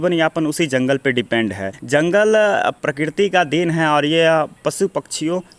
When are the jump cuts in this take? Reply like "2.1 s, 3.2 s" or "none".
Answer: 1.7 s